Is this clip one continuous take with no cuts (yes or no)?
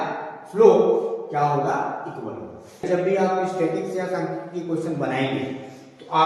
no